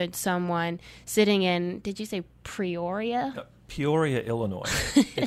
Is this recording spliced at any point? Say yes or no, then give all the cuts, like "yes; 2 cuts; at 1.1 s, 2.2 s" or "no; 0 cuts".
no; 0 cuts